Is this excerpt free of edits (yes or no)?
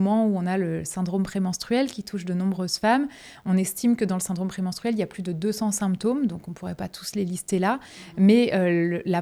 yes